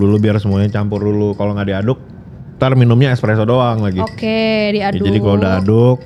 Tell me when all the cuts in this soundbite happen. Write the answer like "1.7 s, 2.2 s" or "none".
none